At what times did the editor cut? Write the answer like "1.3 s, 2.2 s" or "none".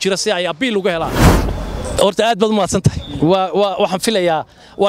1.3 s